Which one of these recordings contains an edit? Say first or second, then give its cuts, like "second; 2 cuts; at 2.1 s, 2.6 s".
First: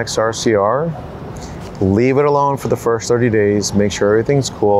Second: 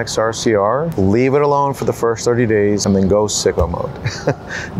second; 2 cuts; at 0.9 s, 2.8 s